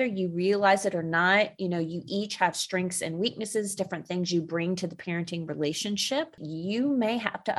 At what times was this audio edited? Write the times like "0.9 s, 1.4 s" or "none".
6.5 s